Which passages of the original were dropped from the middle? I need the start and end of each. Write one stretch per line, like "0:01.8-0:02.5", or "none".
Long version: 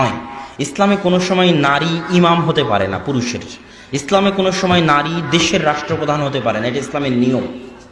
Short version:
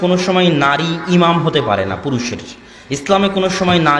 none